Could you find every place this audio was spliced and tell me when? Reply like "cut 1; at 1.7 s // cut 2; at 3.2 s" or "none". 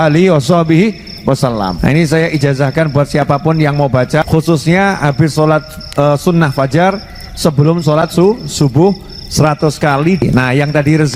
cut 1; at 1.7 s // cut 2; at 4.2 s // cut 3; at 10.2 s